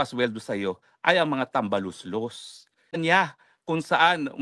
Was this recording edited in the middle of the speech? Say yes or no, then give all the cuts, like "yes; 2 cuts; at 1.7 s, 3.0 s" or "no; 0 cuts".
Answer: yes; 1 cut; at 3.0 s